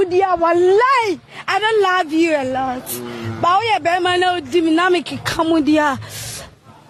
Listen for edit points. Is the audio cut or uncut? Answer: uncut